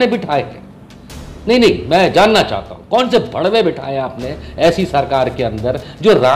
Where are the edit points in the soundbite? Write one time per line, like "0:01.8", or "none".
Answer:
none